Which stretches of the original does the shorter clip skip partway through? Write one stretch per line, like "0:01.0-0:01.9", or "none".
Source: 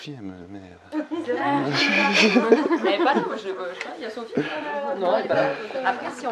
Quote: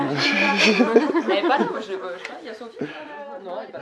none